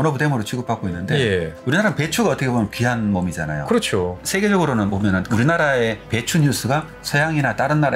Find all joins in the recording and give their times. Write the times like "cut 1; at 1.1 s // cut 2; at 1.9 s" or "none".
cut 1; at 1.6 s // cut 2; at 4.2 s // cut 3; at 5.3 s // cut 4; at 7.0 s